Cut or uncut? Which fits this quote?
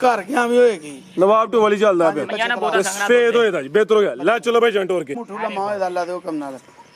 cut